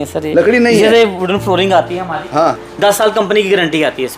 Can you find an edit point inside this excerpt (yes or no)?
yes